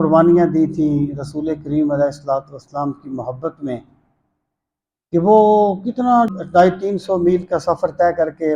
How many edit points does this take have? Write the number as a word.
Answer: one